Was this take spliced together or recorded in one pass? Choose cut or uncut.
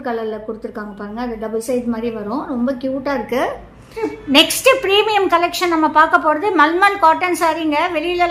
cut